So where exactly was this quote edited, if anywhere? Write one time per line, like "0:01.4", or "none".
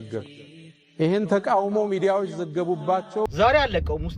0:03.3

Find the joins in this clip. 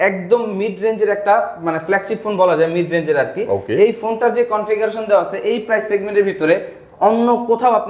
none

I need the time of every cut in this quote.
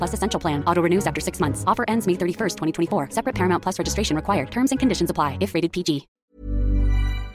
0:06.2

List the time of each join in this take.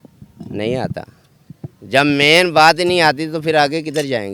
none

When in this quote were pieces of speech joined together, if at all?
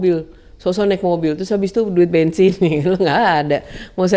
none

